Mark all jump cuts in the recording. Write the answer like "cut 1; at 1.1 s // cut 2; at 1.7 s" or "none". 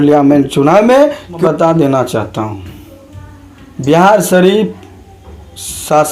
cut 1; at 1.4 s

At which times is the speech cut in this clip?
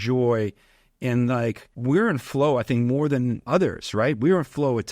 cut 1; at 1.7 s // cut 2; at 3.4 s

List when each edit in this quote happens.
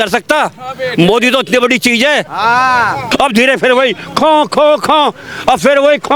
cut 1; at 3.0 s

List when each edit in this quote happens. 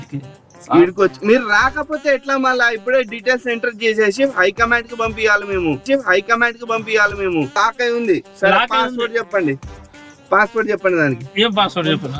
cut 1; at 7.6 s

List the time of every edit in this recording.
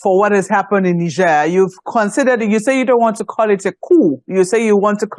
none

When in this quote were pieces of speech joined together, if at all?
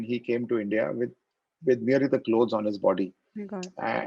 none

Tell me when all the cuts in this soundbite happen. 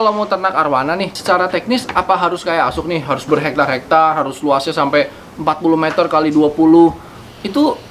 cut 1; at 1.2 s

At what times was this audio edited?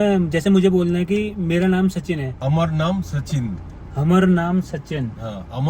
cut 1; at 2.3 s

